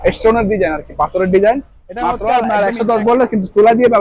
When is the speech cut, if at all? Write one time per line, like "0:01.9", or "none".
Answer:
0:02.2